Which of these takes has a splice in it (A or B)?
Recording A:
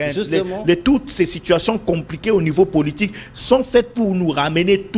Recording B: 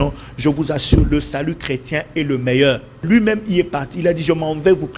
B